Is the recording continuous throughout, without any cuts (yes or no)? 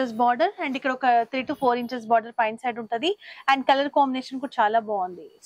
yes